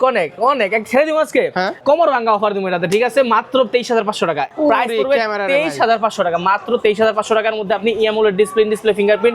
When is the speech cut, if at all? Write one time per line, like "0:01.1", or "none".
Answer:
0:01.7
0:04.4